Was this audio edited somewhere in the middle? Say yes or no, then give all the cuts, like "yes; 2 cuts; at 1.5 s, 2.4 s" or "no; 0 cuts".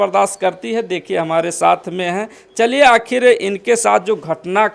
no; 0 cuts